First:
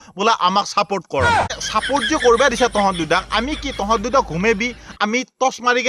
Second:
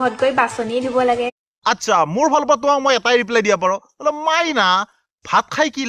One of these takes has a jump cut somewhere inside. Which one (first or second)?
first